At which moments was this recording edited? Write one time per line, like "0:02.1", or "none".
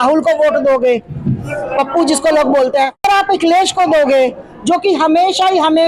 0:03.1

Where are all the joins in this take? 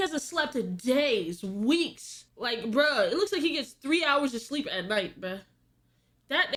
none

